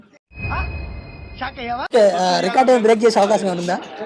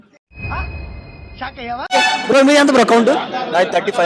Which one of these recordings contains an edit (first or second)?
second